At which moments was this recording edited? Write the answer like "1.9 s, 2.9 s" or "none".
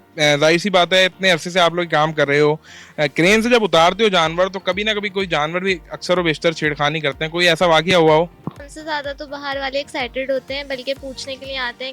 8.7 s